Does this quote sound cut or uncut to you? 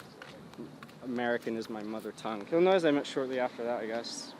cut